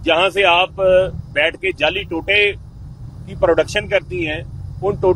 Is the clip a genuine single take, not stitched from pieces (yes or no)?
yes